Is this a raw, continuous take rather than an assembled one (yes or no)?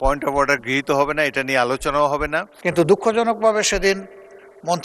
no